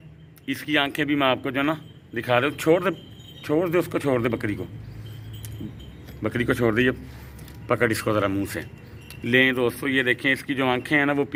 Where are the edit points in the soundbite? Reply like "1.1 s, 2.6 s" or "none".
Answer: none